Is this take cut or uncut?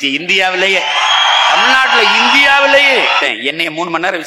cut